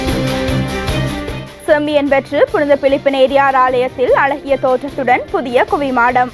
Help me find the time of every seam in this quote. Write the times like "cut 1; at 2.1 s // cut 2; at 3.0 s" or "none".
cut 1; at 1.4 s